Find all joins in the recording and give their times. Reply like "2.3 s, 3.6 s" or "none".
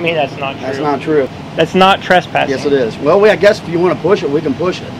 1.4 s